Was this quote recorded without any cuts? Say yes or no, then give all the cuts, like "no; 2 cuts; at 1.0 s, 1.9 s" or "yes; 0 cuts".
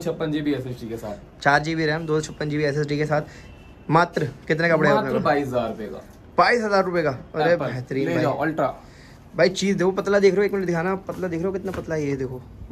yes; 0 cuts